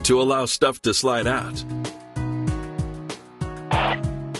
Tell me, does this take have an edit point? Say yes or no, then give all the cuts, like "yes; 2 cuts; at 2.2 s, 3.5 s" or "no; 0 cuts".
no; 0 cuts